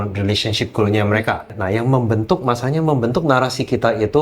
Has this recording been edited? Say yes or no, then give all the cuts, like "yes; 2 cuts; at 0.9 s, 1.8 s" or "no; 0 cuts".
yes; 1 cut; at 1.6 s